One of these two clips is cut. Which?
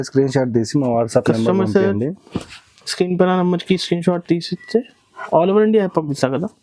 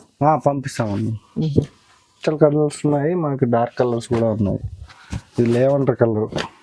second; 1 cut; at 2.2 s

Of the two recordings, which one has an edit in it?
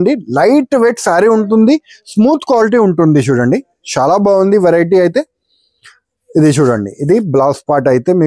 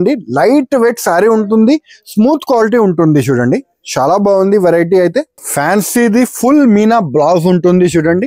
second; 1 cut; at 5.4 s

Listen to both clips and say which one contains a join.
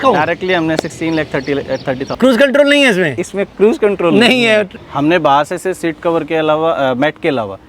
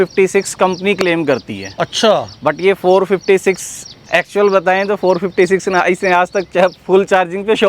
first; 2 cuts; at 2.1 s, 4.8 s

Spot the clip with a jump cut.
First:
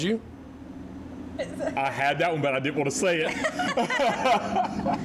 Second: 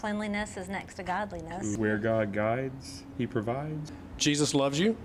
second; 2 cuts; at 1.8 s, 3.8 s

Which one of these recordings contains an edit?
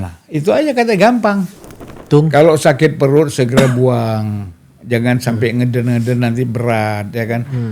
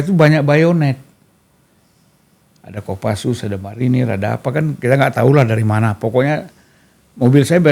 first; 1 cut; at 2.0 s

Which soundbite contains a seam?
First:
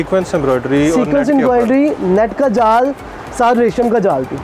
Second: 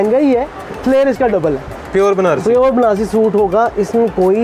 second; 1 cut; at 1.8 s

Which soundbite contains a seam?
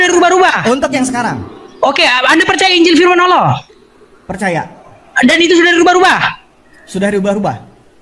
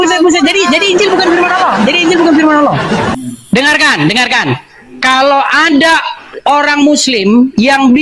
second; 1 cut; at 3.1 s

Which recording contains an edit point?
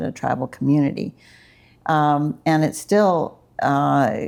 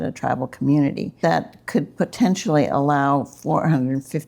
second; 1 cut; at 1.1 s

